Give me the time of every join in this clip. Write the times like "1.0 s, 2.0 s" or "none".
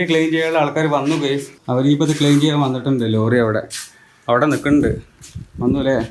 1.5 s